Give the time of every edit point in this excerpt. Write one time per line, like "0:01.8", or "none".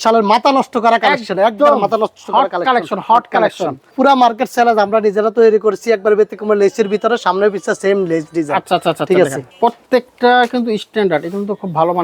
0:03.9
0:09.4